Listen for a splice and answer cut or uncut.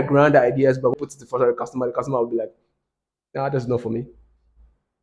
cut